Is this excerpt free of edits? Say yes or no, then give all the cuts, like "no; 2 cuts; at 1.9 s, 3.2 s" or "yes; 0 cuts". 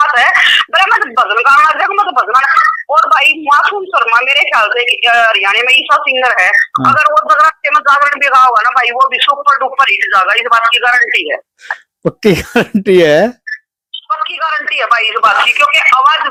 yes; 0 cuts